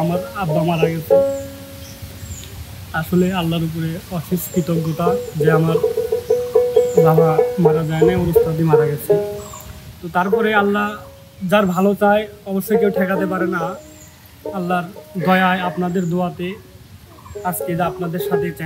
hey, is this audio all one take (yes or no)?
yes